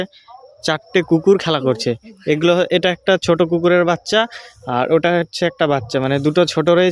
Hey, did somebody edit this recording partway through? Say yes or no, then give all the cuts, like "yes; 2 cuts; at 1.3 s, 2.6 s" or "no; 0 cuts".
no; 0 cuts